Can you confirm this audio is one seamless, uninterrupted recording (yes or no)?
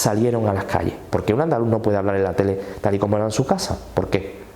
no